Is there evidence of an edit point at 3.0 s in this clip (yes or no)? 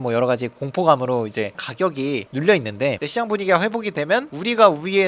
yes